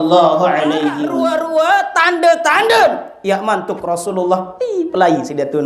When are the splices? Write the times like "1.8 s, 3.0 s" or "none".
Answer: 1.1 s